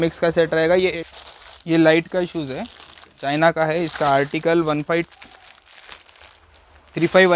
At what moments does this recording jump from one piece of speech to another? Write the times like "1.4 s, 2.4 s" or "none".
0.9 s